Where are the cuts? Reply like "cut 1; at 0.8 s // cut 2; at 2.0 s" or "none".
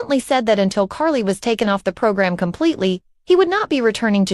none